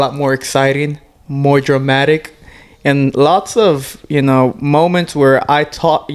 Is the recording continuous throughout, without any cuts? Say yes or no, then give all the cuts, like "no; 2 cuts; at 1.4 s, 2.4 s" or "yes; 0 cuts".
yes; 0 cuts